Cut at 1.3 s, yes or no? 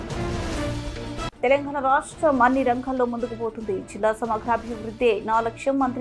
yes